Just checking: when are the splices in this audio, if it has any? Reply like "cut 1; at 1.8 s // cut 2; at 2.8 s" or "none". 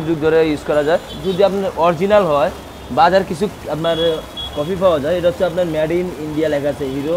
cut 1; at 1.2 s